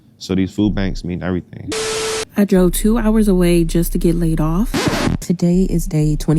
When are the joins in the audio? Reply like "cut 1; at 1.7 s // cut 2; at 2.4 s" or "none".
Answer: cut 1; at 2.0 s // cut 2; at 5.2 s